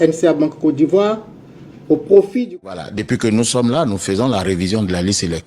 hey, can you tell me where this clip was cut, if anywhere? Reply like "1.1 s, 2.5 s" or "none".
2.5 s